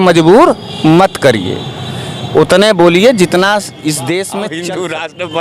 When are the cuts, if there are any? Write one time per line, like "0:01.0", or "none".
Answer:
0:04.4